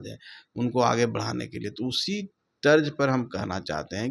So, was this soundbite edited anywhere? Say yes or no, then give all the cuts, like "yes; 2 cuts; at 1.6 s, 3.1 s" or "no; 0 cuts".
no; 0 cuts